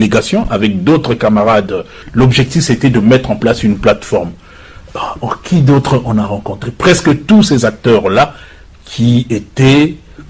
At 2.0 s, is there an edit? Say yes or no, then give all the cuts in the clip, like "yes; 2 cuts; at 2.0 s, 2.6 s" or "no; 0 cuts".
yes; 1 cut; at 2.0 s